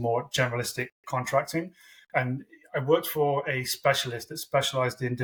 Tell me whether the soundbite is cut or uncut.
uncut